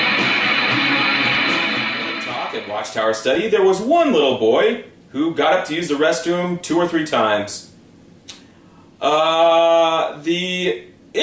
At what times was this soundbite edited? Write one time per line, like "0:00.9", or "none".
0:01.5